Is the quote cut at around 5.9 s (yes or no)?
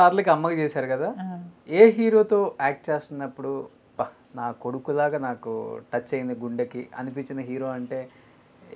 no